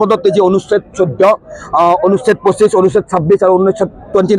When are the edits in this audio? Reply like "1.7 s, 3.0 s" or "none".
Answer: none